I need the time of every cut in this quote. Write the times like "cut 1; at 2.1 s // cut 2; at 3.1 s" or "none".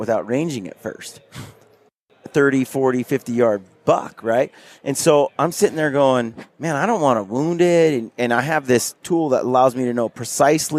none